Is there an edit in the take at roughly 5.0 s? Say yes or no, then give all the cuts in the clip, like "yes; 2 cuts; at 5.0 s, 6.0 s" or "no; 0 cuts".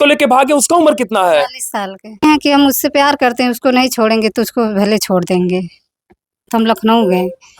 no; 2 cuts; at 2.2 s, 6.5 s